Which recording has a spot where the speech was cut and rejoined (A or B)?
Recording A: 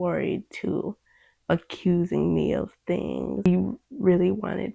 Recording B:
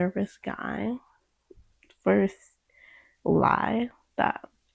A